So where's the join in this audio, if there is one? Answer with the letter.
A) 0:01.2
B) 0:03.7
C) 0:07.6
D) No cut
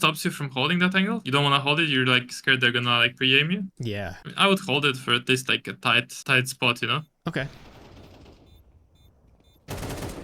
A